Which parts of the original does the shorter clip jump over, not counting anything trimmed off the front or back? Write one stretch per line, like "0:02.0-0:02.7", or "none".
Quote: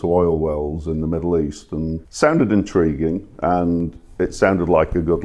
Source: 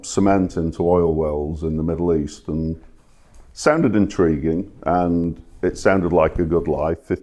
0:02.8-0:03.5